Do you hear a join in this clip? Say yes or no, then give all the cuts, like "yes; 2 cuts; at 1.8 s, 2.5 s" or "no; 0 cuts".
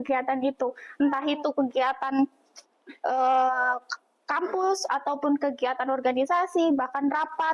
no; 0 cuts